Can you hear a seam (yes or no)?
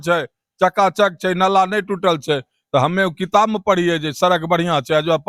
no